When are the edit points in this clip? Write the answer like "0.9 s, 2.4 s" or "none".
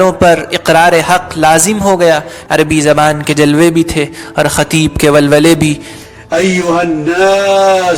2.4 s